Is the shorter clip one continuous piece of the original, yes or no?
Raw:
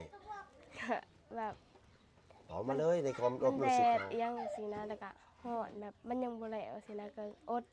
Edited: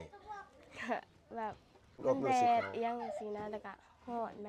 no